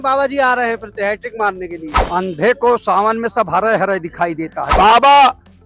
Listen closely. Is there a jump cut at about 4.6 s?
yes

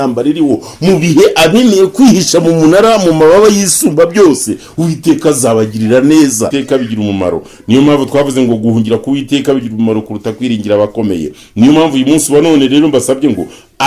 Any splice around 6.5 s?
yes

